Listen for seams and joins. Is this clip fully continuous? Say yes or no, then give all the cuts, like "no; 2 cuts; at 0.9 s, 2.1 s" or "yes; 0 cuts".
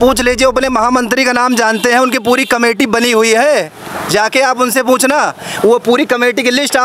yes; 0 cuts